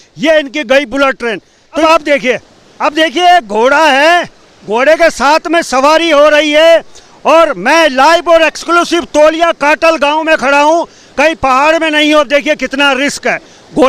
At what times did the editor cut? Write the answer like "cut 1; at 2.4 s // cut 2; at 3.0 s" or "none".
cut 1; at 1.6 s